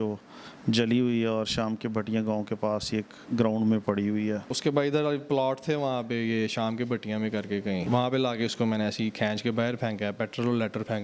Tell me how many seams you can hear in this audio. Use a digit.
2